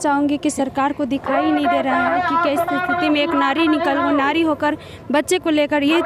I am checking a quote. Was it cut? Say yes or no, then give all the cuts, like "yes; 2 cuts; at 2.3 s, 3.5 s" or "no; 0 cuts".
no; 0 cuts